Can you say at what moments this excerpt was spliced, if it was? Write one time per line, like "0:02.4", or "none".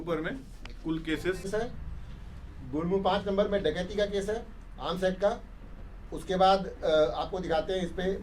0:01.5